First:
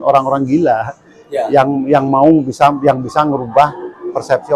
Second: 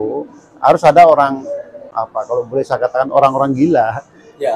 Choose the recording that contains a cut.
second; 1 cut; at 1.8 s

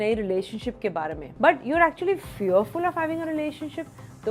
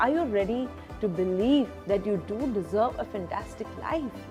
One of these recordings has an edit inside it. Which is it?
first; 1 cut; at 1.2 s

